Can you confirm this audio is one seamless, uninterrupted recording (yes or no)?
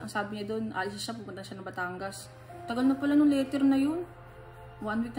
yes